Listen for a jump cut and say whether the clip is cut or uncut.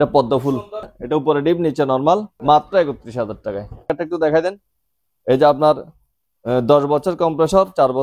cut